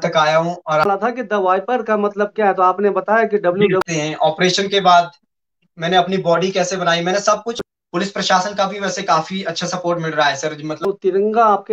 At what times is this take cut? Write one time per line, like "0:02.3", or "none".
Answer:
0:00.8
0:03.8
0:07.5
0:10.8